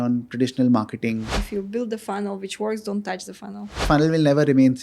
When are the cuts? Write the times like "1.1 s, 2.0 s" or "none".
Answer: 1.3 s, 3.9 s